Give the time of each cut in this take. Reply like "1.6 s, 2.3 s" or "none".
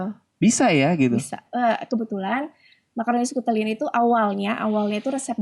1.4 s